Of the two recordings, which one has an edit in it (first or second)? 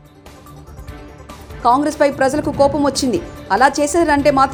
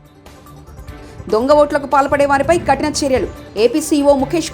second